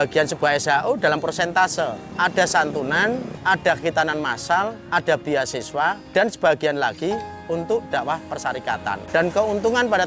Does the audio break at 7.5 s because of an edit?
no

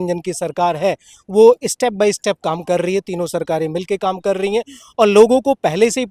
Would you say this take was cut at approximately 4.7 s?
no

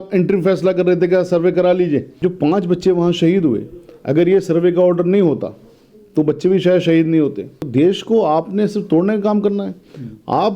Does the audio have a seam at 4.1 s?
no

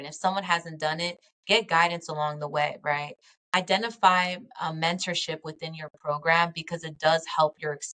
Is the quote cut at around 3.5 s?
yes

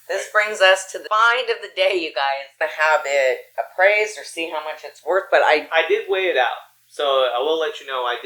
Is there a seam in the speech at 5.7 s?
no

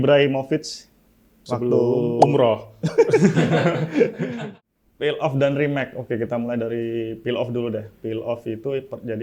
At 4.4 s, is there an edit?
yes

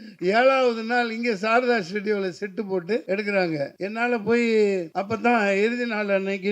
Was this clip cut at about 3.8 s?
yes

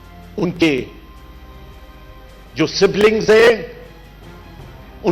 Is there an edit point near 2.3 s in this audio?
no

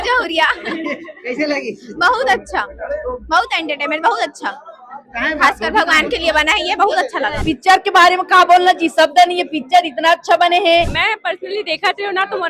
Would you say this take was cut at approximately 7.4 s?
yes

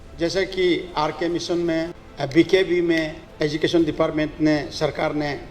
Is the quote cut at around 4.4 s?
no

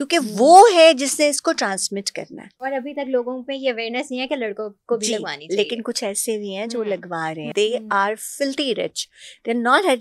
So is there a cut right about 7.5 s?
yes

